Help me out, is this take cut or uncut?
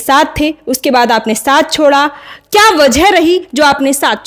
uncut